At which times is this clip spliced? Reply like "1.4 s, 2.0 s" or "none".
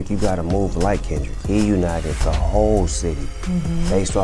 1.4 s

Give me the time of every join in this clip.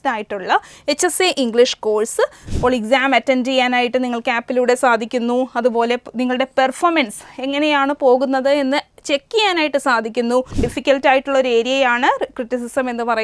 2.4 s, 10.5 s

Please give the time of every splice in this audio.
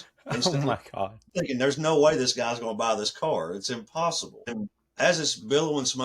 1.3 s, 4.5 s

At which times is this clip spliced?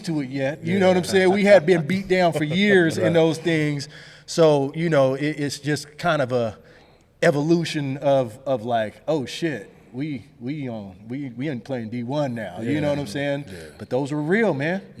none

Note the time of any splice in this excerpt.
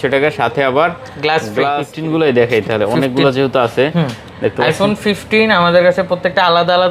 2.0 s

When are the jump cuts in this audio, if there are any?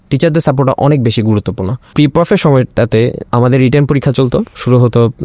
1.9 s, 3.2 s

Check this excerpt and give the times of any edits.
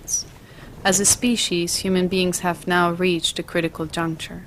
3.3 s

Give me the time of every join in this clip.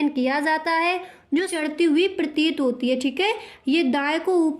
1.5 s

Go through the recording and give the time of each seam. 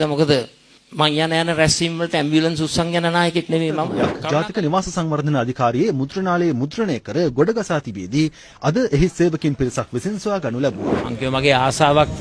4.1 s, 11.1 s

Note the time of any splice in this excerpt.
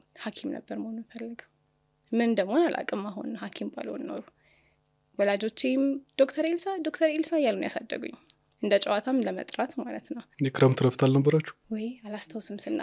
10.2 s

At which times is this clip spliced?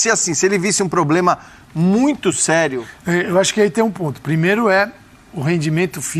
2.9 s

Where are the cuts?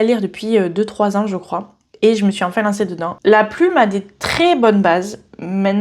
3.2 s

